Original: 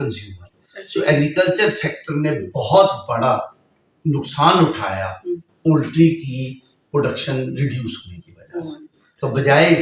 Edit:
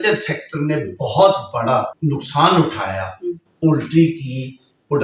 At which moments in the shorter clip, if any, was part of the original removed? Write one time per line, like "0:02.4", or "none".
0:02.0